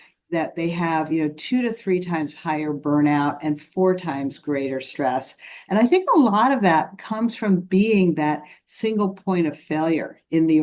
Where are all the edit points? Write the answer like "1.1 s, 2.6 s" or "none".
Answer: none